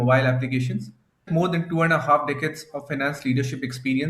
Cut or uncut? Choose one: cut